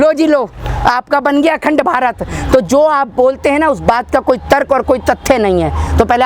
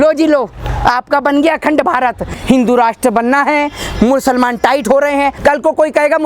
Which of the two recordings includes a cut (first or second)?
second